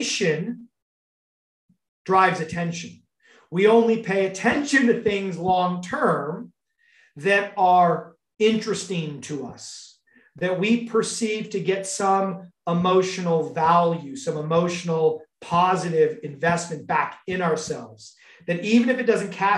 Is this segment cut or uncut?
uncut